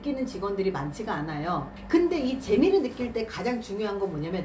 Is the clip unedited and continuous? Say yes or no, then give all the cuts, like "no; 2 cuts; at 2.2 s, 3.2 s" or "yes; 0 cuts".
yes; 0 cuts